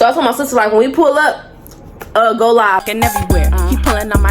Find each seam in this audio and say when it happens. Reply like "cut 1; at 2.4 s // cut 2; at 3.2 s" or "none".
cut 1; at 2.8 s